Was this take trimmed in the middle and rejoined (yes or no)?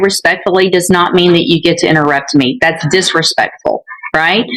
no